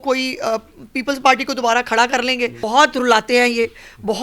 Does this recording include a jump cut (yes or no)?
yes